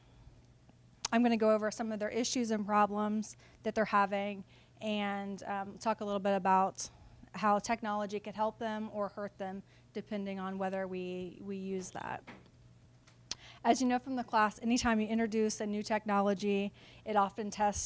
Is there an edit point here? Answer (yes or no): yes